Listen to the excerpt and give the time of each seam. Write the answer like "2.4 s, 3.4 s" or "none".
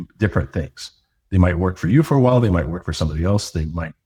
none